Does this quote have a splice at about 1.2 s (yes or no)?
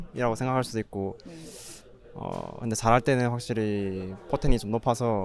no